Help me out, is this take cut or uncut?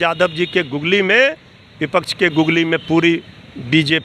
uncut